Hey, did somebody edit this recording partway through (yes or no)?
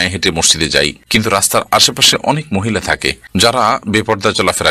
yes